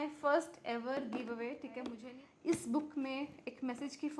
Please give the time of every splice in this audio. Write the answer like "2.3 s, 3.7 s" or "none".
2.0 s